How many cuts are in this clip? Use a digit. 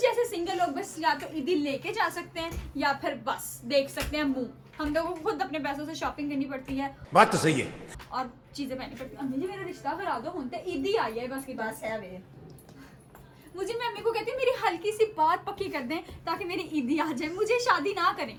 0